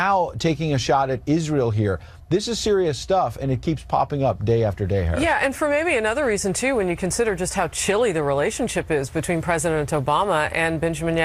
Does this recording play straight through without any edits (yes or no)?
yes